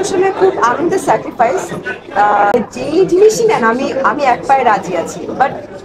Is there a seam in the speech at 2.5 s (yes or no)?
yes